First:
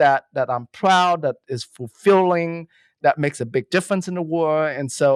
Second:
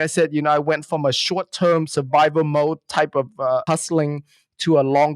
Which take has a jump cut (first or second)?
second